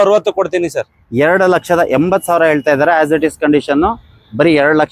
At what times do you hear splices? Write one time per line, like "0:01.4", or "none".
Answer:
none